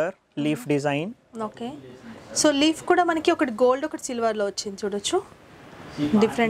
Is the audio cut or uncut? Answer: uncut